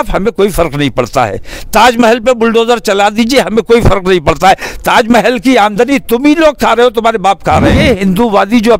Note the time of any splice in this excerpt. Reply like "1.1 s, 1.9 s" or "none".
7.8 s